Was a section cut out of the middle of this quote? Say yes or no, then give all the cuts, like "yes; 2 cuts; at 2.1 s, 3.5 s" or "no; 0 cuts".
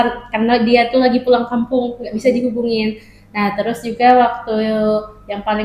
no; 0 cuts